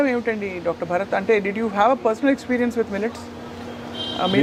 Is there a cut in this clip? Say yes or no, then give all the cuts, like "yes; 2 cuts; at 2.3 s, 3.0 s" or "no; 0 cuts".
no; 0 cuts